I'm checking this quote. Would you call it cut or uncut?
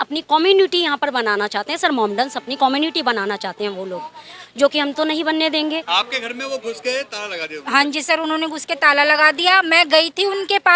cut